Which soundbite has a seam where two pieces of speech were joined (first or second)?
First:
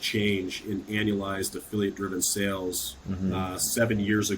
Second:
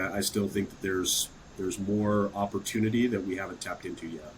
first